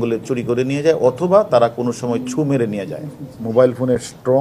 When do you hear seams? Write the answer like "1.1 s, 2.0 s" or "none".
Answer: 3.3 s